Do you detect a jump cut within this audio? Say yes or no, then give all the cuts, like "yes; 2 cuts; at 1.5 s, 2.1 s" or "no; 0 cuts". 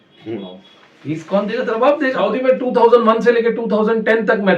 yes; 1 cut; at 2.2 s